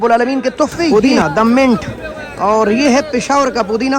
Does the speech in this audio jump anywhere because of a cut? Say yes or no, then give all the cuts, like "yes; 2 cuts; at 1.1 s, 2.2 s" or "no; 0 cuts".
yes; 1 cut; at 0.9 s